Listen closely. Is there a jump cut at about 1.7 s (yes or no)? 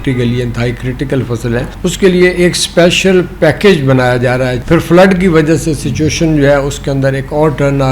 yes